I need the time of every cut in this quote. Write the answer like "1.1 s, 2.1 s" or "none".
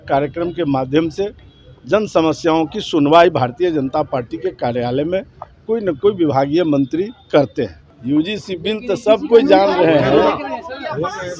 7.9 s